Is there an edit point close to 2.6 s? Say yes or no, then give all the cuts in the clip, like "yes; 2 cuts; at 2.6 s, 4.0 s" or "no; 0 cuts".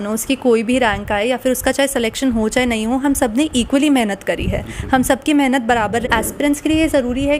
no; 1 cut; at 6.1 s